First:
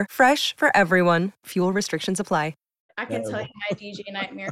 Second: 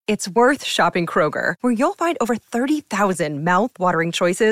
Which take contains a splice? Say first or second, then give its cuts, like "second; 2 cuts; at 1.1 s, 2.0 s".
first; 1 cut; at 2.9 s